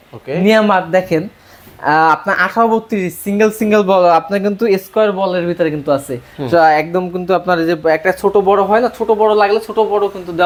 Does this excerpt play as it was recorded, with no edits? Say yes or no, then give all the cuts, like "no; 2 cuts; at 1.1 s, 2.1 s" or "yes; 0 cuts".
yes; 0 cuts